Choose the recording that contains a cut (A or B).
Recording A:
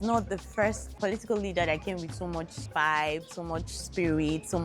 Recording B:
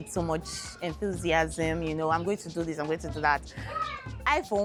A